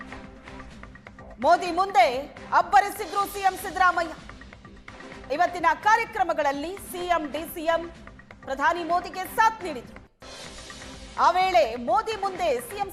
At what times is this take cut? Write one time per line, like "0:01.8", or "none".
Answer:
0:01.1